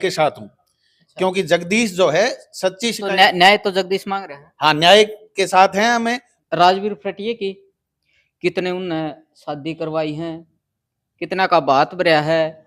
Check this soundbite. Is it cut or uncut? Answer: cut